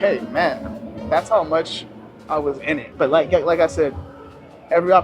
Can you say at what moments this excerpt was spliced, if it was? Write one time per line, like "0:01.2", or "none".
0:02.9